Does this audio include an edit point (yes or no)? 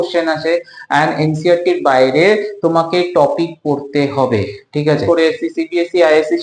yes